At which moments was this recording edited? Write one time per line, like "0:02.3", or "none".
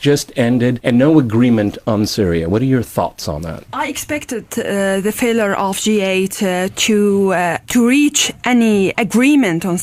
0:06.8